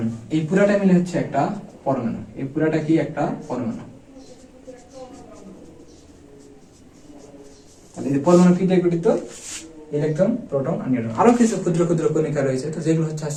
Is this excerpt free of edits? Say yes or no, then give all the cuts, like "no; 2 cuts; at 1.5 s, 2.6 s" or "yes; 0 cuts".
yes; 0 cuts